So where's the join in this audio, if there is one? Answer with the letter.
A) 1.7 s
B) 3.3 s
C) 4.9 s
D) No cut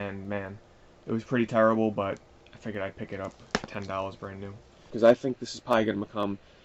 C